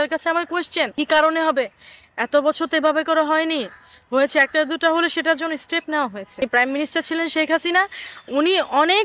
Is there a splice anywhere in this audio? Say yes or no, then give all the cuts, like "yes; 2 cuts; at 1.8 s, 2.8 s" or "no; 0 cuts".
yes; 2 cuts; at 0.9 s, 6.4 s